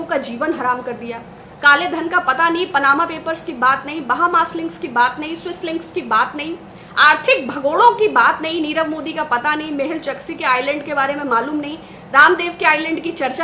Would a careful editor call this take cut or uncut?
uncut